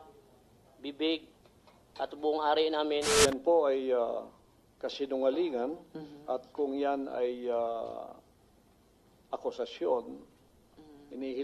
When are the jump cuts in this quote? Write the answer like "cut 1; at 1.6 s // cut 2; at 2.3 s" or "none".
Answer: cut 1; at 3.1 s